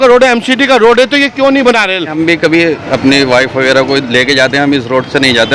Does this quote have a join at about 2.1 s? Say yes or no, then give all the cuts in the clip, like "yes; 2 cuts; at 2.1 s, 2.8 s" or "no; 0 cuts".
yes; 1 cut; at 2.1 s